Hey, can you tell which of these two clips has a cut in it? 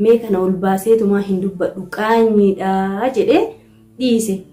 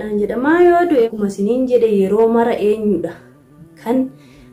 second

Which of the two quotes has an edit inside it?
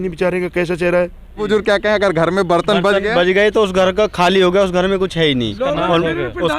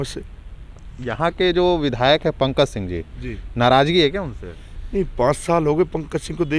first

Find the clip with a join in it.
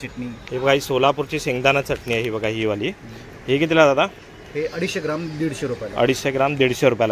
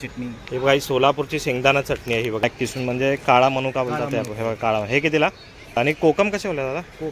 second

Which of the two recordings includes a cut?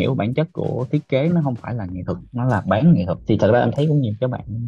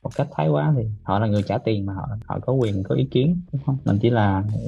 first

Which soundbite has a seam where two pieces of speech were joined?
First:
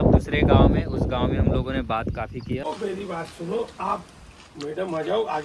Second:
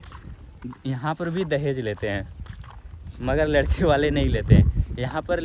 first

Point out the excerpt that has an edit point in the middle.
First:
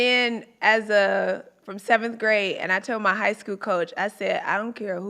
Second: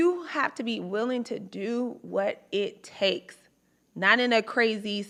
first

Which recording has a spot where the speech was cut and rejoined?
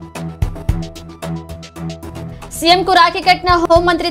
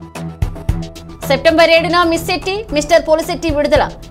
second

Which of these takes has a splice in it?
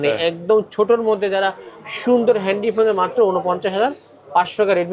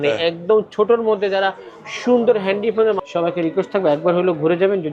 second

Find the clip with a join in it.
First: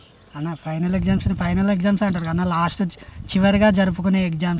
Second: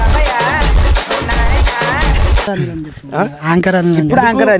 second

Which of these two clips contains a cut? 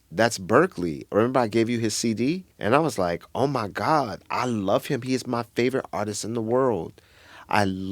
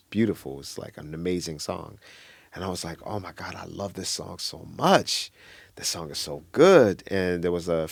first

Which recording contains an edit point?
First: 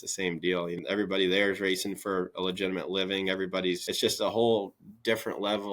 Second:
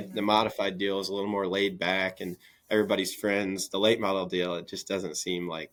first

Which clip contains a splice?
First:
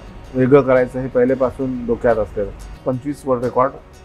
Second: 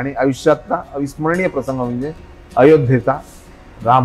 first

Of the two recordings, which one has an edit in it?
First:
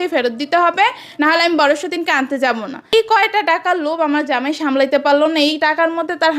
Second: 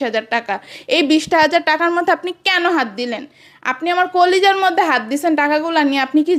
first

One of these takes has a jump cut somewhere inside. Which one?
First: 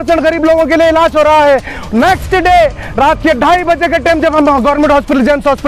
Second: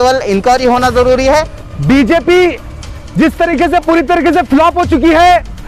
second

